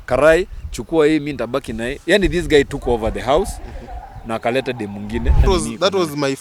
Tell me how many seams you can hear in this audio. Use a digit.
1